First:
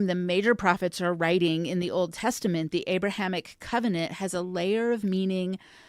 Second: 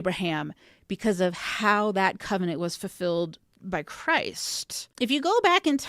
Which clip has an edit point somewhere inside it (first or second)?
second